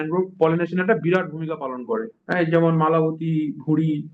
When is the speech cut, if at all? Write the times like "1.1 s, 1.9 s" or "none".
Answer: 2.2 s